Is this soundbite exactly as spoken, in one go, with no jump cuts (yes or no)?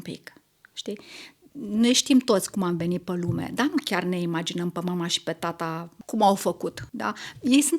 no